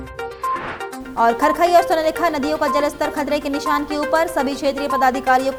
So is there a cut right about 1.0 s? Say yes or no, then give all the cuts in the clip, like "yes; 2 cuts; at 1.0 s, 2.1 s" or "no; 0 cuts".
no; 0 cuts